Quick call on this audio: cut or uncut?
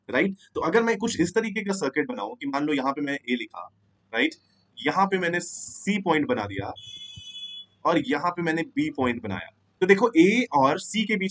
uncut